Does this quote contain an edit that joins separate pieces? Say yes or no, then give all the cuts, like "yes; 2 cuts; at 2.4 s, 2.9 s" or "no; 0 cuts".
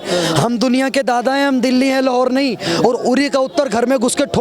no; 0 cuts